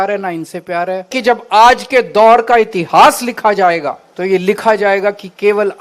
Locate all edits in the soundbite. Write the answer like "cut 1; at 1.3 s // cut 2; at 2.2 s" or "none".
cut 1; at 1.0 s // cut 2; at 4.0 s